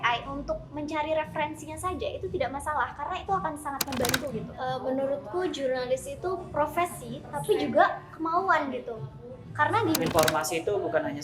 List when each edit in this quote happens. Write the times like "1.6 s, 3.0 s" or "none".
4.5 s, 10.0 s